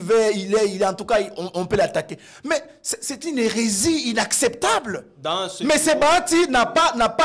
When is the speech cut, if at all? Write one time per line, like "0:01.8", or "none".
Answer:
none

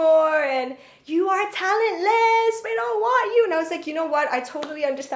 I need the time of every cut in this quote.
none

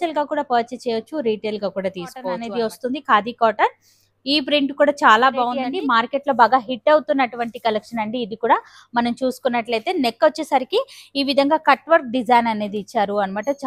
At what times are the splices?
0:02.4
0:05.6

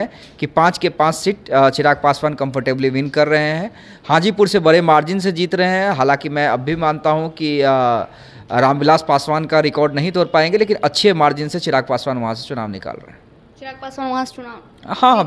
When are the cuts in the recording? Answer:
none

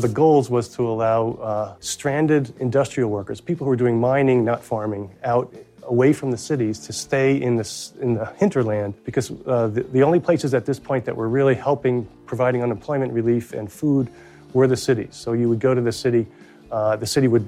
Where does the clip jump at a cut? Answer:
0:01.8
0:09.0

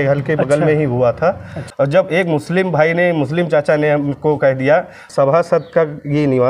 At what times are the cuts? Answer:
0:01.6
0:05.0

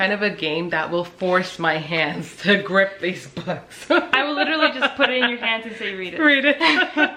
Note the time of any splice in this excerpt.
none

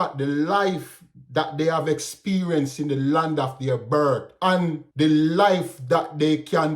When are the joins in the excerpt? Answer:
0:04.6

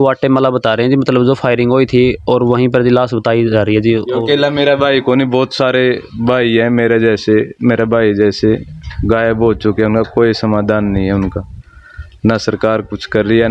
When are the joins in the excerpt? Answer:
0:04.1

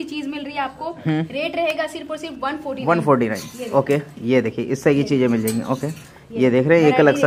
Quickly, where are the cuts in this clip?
none

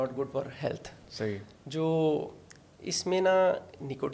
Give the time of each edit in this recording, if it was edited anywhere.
none

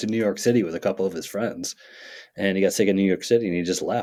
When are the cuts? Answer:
none

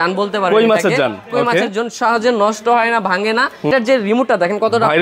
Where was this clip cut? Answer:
0:03.7

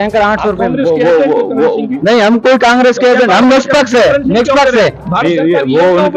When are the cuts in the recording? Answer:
none

